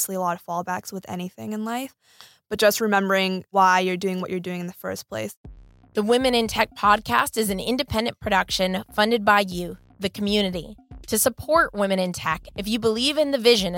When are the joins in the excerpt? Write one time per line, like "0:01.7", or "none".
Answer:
0:03.4
0:05.3

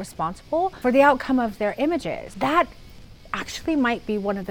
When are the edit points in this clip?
0:00.8
0:02.2

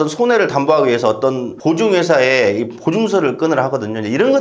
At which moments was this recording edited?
0:01.5

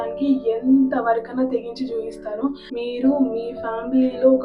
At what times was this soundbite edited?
0:02.6

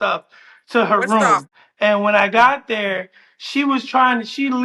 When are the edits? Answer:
0:01.5

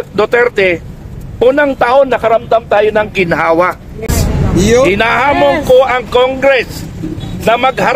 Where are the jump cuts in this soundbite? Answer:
0:04.1

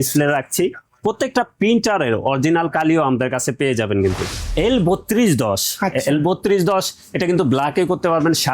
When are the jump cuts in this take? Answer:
0:04.3

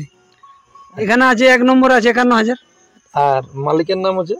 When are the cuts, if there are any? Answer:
0:01.0

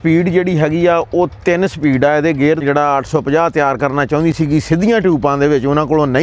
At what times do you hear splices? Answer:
0:02.6

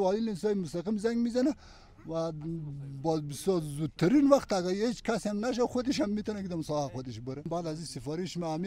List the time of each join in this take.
0:07.5

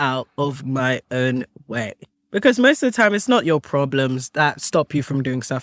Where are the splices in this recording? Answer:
none

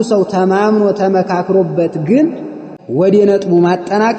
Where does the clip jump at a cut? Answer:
0:03.0

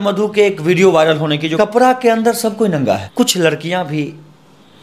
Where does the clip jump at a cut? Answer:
0:01.5
0:03.1

